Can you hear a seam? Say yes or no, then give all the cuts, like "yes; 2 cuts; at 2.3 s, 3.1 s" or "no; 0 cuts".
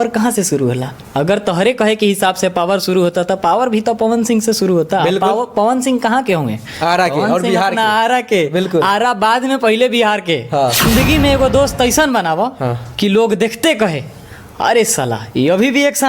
yes; 1 cut; at 10.8 s